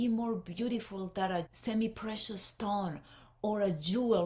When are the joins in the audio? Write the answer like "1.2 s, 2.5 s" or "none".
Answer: 1.5 s